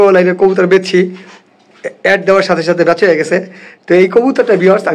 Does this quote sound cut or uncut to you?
uncut